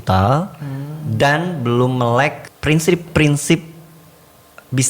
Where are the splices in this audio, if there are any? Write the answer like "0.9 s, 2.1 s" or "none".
2.5 s